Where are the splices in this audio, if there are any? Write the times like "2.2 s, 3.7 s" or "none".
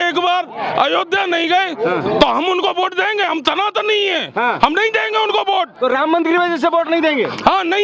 none